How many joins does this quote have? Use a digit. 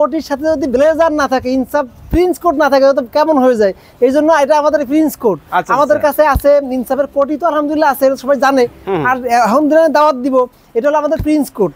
0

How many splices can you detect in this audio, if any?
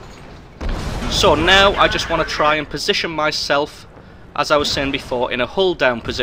1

